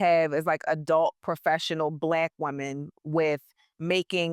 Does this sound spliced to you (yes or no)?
no